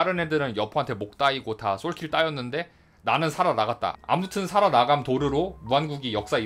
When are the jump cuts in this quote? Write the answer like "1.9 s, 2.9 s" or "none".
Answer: 3.9 s